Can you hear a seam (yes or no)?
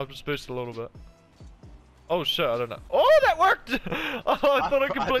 no